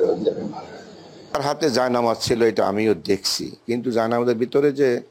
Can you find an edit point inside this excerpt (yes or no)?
yes